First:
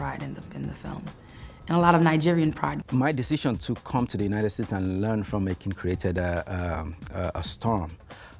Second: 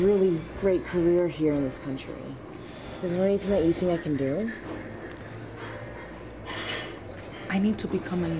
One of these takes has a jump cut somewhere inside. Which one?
first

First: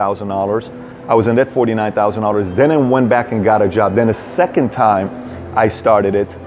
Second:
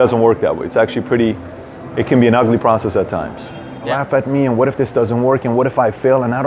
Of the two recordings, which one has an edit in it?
second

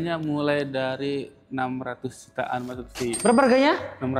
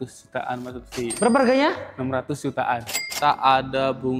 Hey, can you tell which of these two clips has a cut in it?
second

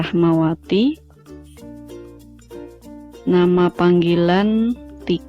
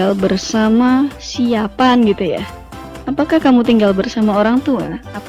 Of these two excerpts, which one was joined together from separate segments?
first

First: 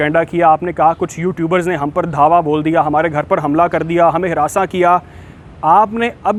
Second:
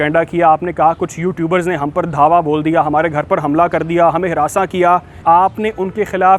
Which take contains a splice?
second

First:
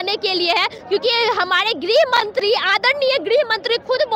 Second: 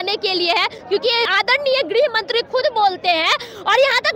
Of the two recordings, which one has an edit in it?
second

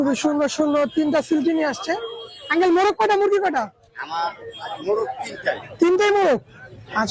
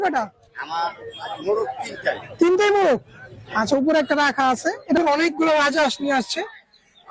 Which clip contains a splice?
second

